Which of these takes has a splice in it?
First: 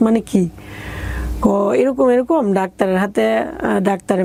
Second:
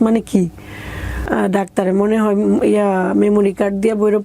second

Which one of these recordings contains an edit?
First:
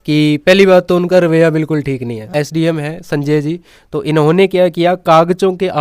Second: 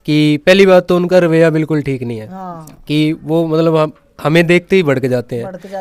first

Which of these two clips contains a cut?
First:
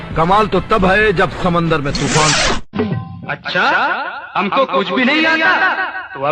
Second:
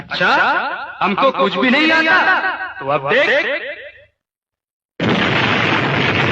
first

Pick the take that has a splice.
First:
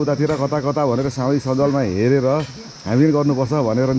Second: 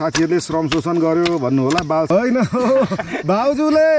second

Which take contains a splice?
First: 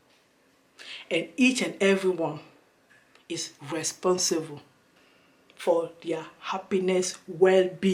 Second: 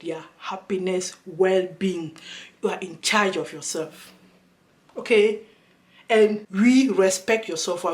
second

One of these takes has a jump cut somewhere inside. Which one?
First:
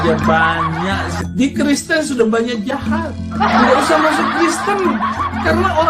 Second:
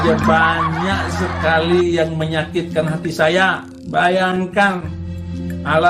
first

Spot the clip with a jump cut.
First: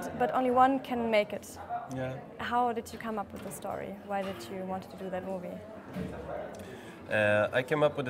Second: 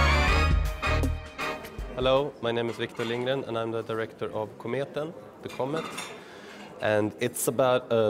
first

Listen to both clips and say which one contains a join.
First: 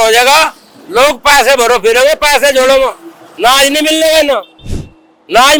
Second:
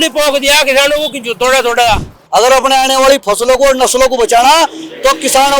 second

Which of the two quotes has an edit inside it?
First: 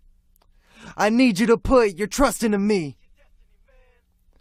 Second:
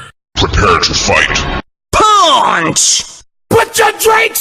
second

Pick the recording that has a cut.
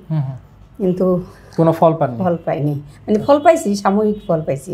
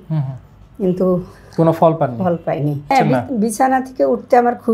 second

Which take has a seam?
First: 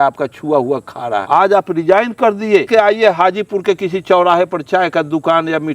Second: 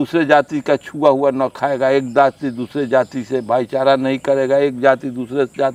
first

